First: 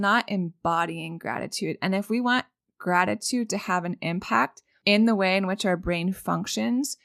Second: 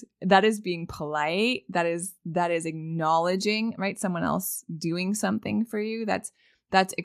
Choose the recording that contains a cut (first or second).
first